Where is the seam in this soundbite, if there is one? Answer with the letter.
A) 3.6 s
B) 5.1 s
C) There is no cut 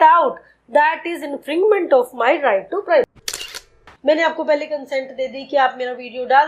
A